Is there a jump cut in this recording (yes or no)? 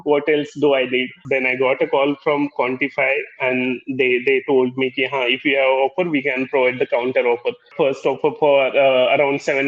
yes